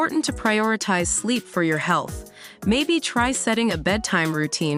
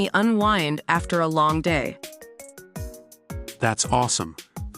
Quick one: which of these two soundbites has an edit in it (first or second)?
second